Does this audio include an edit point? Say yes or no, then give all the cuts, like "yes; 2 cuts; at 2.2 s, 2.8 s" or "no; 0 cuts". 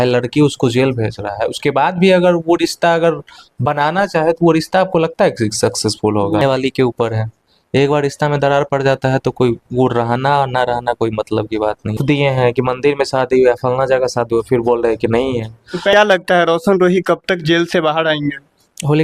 yes; 3 cuts; at 6.4 s, 12.0 s, 15.9 s